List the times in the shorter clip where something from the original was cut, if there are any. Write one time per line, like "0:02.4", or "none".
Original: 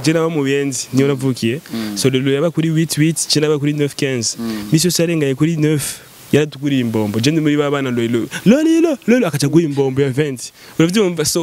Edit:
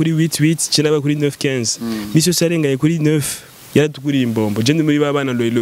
none